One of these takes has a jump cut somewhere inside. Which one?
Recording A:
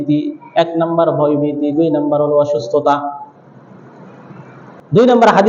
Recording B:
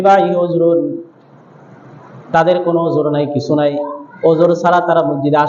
A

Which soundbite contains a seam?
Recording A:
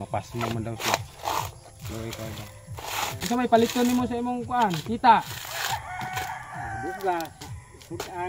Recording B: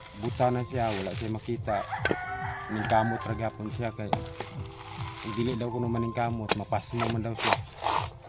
A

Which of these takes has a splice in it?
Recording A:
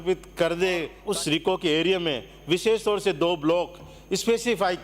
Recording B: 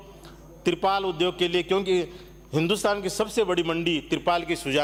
A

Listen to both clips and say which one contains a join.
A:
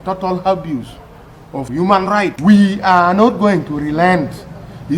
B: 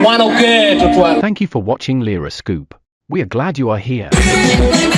A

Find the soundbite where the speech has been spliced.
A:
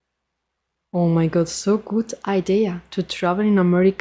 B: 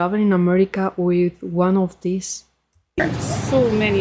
B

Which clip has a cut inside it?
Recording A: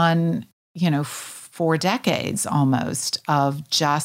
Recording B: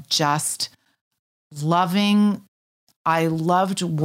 B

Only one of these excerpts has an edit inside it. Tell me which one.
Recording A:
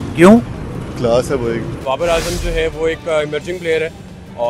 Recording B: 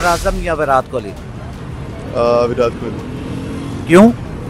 A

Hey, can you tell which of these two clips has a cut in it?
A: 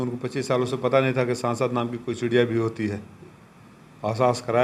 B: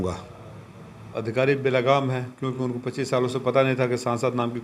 B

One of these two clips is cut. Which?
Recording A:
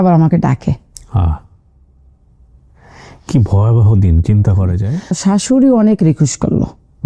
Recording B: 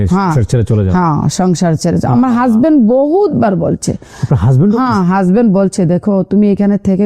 A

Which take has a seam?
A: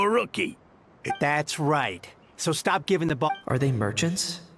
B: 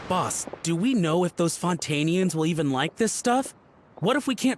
A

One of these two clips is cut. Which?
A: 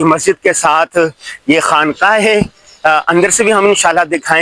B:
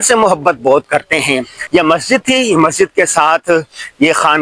B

